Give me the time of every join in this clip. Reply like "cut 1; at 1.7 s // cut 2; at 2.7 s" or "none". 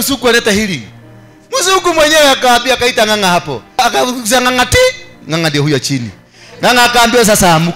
cut 1; at 3.8 s

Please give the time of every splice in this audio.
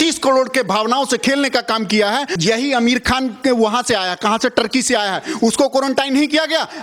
cut 1; at 2.4 s

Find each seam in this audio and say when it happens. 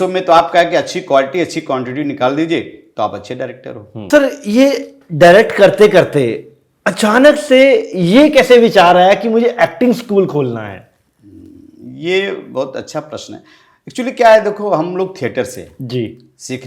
cut 1; at 4.1 s

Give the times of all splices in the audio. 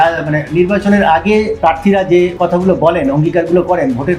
cut 1; at 1.5 s // cut 2; at 2.3 s

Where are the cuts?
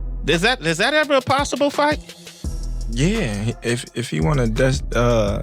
none

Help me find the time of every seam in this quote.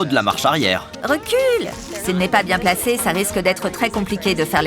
cut 1; at 0.9 s

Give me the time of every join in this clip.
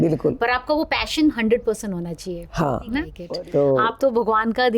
cut 1; at 3.1 s

